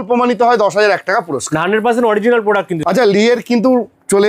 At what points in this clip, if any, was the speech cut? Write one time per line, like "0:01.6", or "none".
0:02.8